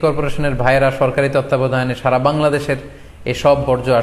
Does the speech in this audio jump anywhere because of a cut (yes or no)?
no